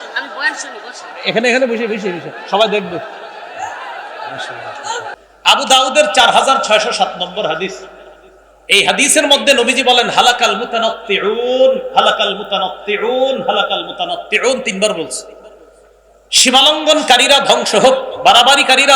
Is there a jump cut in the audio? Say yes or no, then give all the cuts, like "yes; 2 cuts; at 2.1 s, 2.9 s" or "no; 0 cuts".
yes; 1 cut; at 5.2 s